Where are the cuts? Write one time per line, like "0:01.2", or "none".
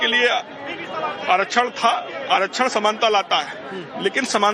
0:01.1